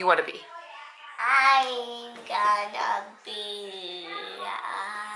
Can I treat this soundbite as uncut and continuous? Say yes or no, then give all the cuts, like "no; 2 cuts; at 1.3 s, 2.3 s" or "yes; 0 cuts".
yes; 0 cuts